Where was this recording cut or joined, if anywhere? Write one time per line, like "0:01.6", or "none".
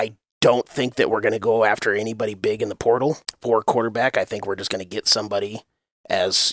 none